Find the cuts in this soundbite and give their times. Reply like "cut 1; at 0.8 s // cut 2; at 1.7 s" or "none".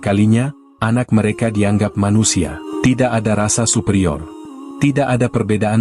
cut 1; at 2.6 s